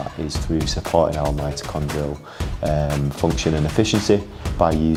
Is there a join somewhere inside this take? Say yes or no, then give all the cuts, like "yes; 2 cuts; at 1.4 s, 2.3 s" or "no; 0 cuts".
no; 0 cuts